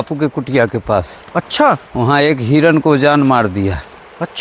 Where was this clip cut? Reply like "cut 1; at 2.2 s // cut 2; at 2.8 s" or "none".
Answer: none